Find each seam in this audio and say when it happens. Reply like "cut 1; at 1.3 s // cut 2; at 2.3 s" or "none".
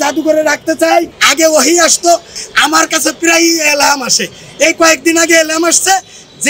cut 1; at 1.2 s // cut 2; at 2.3 s